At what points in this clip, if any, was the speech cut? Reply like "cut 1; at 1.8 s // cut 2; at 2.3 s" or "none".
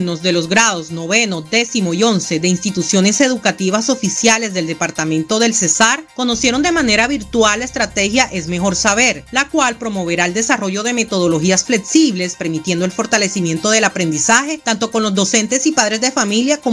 none